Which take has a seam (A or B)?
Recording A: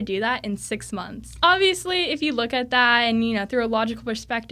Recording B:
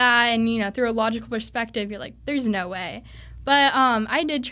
A